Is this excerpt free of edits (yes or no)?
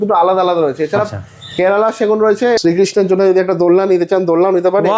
no